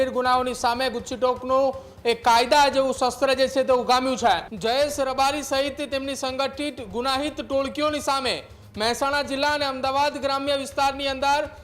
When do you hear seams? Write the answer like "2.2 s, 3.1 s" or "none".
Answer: 4.5 s